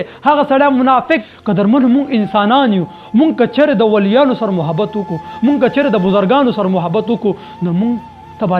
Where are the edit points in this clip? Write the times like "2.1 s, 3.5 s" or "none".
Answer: 1.2 s